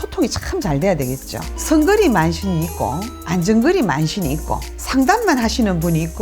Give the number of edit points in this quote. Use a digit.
1